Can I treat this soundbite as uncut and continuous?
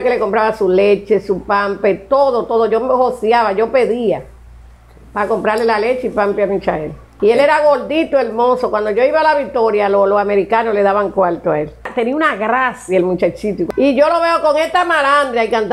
no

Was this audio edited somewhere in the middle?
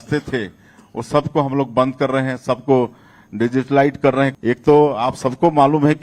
yes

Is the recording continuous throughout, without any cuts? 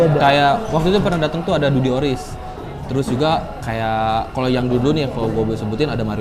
yes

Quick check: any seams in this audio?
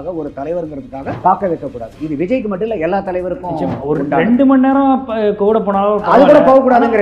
yes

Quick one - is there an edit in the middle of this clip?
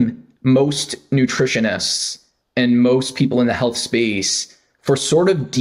no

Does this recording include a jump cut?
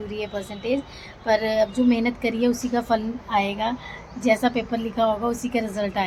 no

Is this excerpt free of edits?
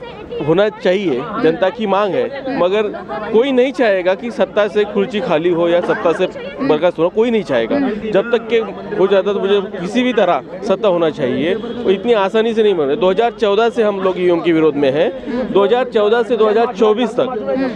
yes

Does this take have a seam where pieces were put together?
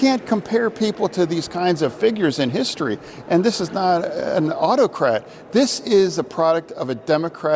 no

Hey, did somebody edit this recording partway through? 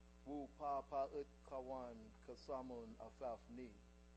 no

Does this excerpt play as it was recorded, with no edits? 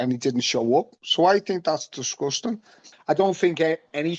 no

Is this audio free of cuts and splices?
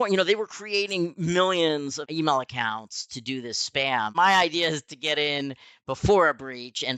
no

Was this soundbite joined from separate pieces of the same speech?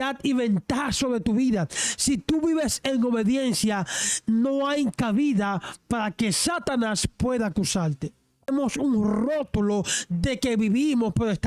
yes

